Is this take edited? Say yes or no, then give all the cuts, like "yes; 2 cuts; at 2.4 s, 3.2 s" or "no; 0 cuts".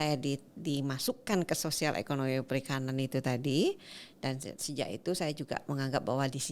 no; 0 cuts